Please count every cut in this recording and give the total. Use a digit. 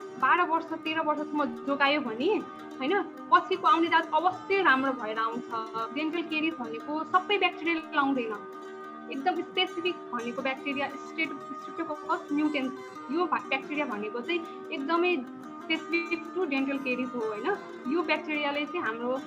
1